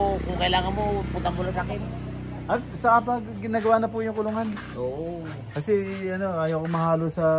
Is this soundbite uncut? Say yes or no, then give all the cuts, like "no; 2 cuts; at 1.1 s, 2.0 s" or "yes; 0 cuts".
yes; 0 cuts